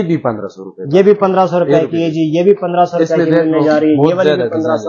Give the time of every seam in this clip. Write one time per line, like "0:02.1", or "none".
none